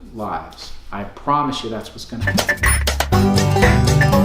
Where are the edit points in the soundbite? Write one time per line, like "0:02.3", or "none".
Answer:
0:02.2